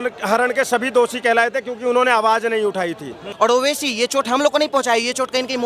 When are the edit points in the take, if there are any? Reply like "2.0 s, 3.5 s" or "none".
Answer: 3.2 s

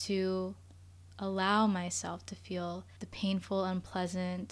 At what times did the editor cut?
3.0 s

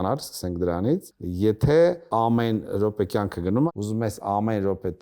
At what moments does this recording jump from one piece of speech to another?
1.2 s, 2.0 s, 3.7 s

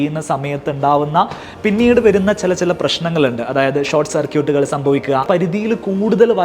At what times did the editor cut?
5.2 s

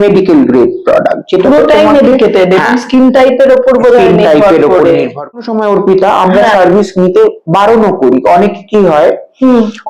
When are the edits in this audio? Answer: 5.4 s

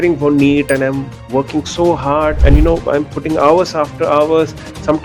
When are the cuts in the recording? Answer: 2.4 s

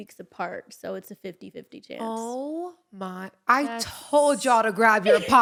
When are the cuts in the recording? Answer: none

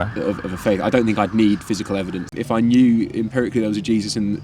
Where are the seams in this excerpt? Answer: 2.3 s

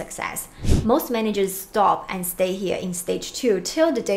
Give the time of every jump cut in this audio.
none

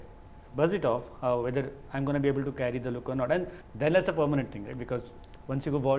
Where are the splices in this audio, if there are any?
3.6 s

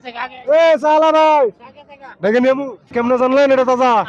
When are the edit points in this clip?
2.9 s

